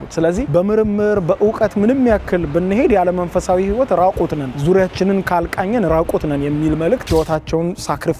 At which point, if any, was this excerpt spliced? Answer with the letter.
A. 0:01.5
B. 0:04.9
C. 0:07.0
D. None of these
C